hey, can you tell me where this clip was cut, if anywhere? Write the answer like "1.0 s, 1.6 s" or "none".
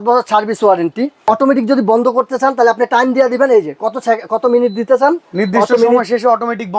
1.2 s